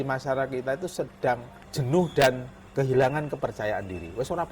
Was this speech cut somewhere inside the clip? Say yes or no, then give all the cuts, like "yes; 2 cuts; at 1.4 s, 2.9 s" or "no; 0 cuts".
yes; 2 cuts; at 1.6 s, 2.6 s